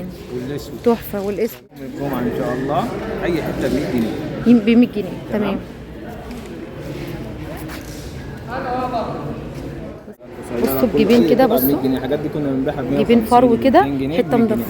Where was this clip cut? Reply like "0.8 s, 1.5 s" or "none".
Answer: 1.9 s, 10.1 s